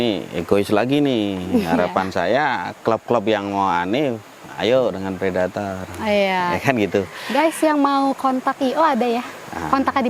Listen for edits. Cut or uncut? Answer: uncut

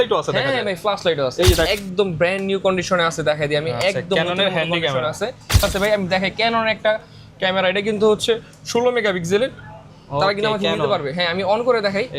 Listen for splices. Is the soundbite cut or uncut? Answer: cut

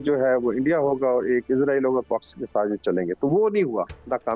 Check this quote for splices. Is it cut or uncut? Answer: uncut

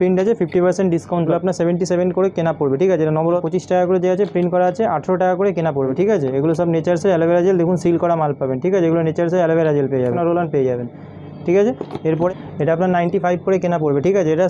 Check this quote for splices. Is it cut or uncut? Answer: cut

